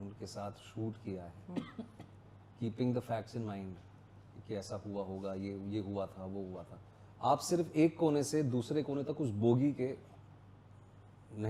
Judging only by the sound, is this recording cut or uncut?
uncut